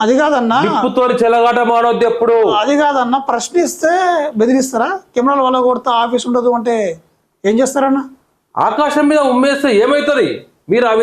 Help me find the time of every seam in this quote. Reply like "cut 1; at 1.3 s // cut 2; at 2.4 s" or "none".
none